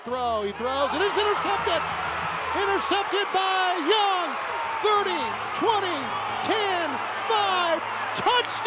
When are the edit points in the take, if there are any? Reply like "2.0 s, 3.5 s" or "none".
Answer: none